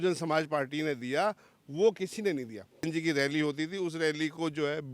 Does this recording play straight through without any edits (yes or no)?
no